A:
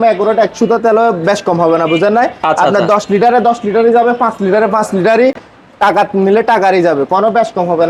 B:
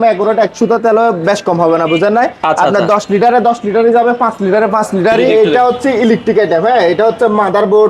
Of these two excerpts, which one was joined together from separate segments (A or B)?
B